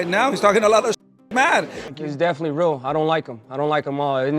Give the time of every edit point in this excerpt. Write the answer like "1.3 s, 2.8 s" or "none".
1.9 s